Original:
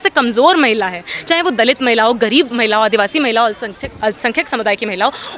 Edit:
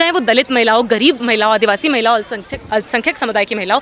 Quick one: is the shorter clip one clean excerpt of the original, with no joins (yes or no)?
yes